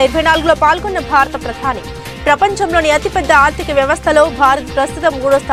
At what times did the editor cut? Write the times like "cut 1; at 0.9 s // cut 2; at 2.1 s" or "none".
none